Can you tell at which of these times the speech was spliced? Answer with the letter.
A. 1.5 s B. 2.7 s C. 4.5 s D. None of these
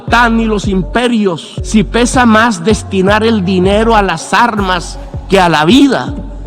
A